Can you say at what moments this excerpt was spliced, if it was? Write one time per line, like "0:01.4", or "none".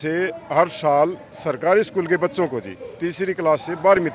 none